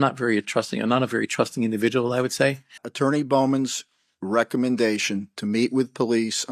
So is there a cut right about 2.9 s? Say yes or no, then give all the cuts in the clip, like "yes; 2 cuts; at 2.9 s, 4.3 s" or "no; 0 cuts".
yes; 1 cut; at 2.9 s